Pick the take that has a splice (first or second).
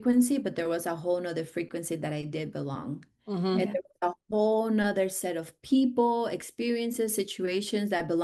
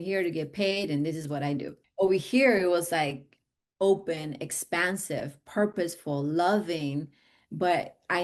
second